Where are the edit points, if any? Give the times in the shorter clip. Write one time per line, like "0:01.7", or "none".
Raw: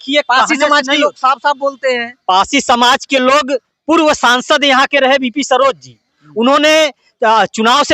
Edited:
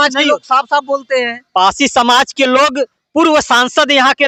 none